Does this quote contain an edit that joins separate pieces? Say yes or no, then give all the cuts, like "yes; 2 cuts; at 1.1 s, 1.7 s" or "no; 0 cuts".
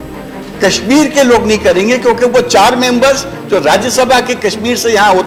no; 0 cuts